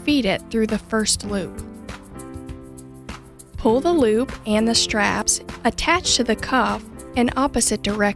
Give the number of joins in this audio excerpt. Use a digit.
2